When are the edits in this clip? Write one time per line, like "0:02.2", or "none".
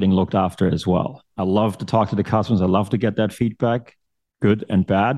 0:01.2

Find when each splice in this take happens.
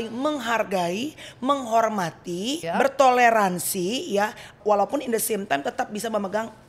0:02.6
0:04.6

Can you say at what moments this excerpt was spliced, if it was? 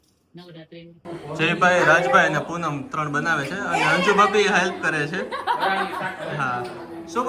0:01.0

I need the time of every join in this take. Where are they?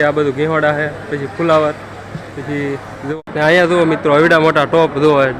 0:03.1

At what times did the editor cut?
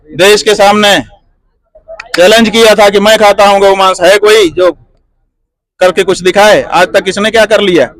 none

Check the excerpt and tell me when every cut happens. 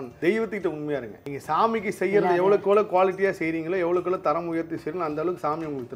0:01.2

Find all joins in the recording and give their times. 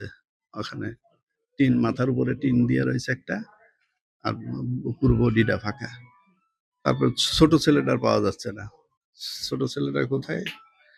none

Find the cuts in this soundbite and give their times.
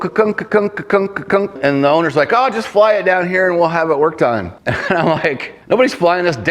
0:01.6
0:04.6
0:05.5

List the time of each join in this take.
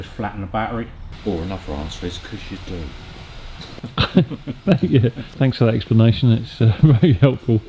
0:01.1
0:05.2

